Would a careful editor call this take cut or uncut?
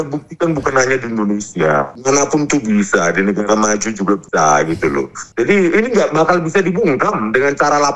cut